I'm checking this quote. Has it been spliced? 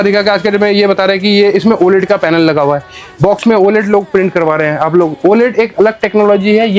no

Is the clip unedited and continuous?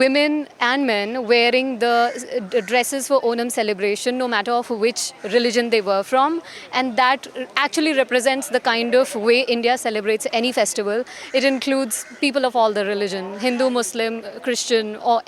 yes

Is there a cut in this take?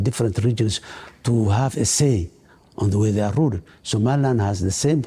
yes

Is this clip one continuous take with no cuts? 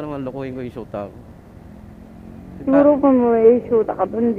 yes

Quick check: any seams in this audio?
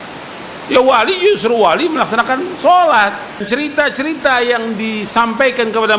yes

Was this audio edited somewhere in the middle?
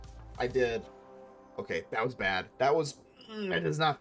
no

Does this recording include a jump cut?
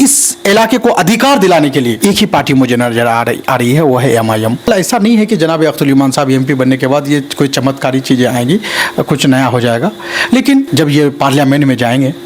yes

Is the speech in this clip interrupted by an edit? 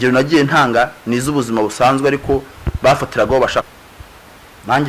yes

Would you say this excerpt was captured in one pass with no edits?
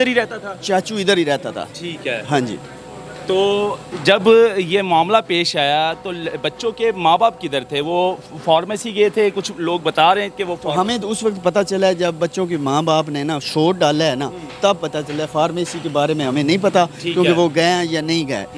yes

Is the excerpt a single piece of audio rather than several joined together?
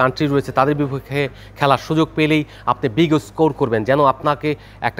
yes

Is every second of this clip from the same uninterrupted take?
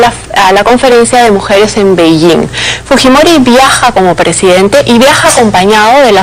yes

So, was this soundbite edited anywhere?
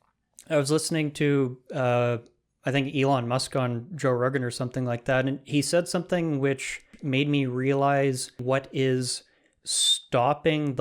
yes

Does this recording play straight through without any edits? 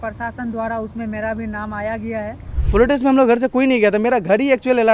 no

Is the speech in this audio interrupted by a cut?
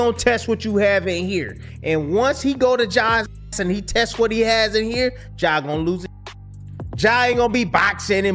no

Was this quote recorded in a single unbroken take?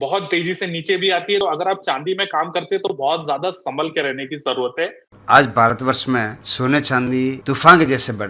no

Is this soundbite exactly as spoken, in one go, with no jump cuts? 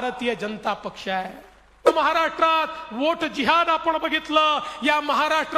no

